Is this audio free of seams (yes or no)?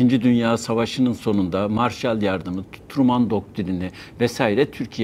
yes